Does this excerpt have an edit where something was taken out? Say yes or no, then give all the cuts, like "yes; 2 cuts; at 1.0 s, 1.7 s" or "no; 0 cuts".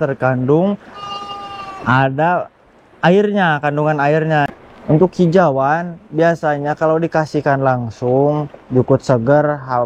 yes; 1 cut; at 4.5 s